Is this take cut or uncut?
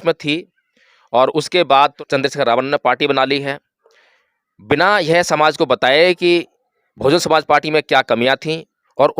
cut